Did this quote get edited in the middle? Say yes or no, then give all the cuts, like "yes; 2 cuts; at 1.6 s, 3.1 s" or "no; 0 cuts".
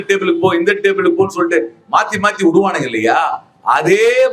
no; 0 cuts